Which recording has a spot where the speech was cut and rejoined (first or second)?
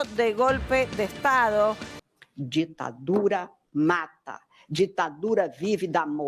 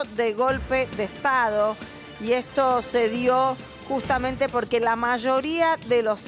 first